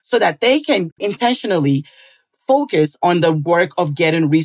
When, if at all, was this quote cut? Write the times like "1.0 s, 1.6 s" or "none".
1.1 s

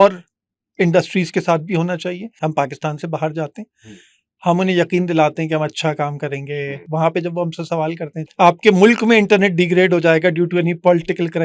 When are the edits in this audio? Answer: 2.3 s, 6.8 s, 8.2 s

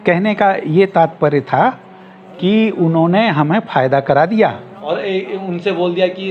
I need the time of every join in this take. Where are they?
4.9 s

